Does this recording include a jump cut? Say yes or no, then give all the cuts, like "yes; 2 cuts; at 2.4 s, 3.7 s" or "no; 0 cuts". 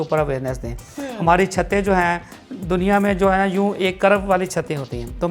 no; 0 cuts